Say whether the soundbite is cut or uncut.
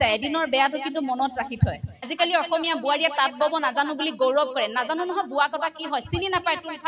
cut